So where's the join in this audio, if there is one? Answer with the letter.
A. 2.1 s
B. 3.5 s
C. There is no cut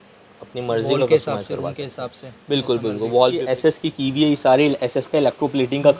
B